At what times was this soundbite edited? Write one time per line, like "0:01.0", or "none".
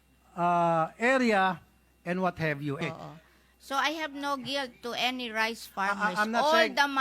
0:02.8